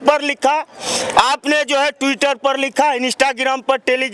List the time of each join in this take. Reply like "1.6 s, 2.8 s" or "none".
none